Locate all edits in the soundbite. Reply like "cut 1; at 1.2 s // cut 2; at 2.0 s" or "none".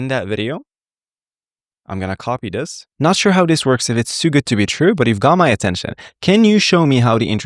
cut 1; at 2.8 s